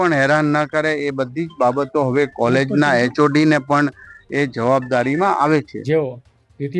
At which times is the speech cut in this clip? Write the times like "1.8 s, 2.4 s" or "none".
5.8 s